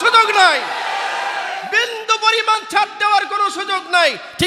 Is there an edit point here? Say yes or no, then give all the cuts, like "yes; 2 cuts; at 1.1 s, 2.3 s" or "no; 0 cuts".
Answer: no; 0 cuts